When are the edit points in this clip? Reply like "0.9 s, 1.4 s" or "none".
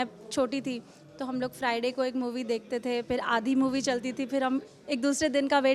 none